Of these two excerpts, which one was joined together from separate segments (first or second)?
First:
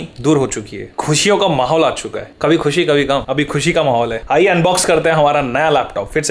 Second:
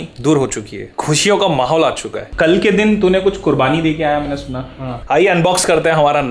second